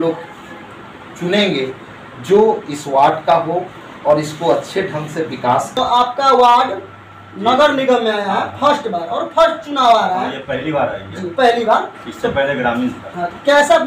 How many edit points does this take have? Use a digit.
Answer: 1